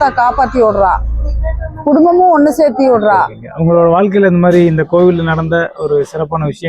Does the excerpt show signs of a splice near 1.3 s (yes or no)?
no